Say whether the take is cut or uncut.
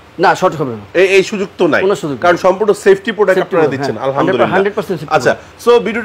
uncut